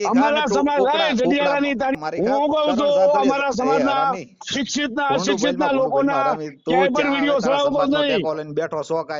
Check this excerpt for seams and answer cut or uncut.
cut